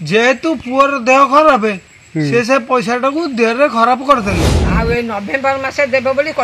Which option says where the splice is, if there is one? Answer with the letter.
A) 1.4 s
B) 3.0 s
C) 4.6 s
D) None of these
C